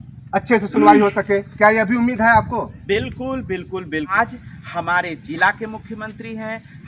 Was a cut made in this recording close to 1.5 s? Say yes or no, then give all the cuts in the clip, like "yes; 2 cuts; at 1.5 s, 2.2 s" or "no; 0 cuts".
no; 1 cut; at 4.1 s